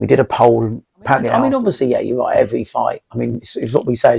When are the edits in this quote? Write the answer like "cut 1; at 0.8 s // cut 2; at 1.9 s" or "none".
cut 1; at 1.4 s

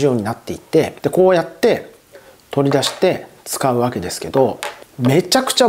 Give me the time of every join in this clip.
cut 1; at 0.9 s

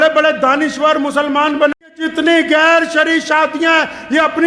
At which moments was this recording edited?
cut 1; at 1.9 s

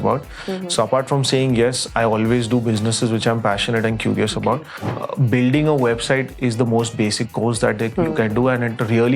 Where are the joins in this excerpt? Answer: cut 1; at 4.8 s

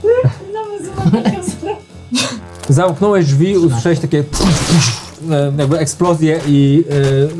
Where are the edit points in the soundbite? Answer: cut 1; at 2.5 s

